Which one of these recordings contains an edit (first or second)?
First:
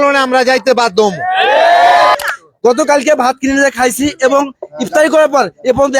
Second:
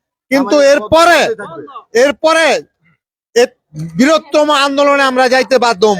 first